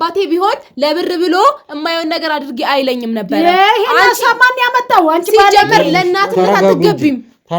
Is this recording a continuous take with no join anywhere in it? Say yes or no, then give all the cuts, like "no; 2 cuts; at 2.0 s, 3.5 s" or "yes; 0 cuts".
yes; 0 cuts